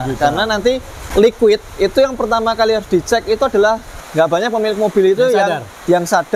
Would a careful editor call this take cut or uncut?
cut